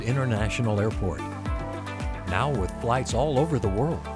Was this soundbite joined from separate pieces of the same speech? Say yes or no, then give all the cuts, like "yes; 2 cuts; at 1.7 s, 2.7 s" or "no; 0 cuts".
no; 0 cuts